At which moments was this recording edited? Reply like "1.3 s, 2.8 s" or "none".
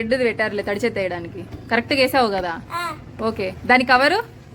none